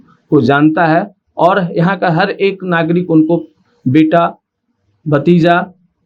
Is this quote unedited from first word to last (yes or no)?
yes